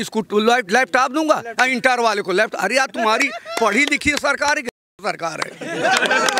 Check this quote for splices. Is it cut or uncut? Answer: uncut